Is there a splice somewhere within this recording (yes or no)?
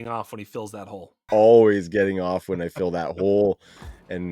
yes